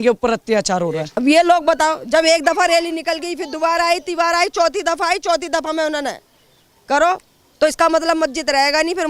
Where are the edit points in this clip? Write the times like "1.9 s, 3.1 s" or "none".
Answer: 1.1 s